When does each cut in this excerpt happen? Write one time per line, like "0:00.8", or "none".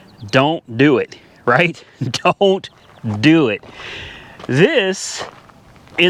none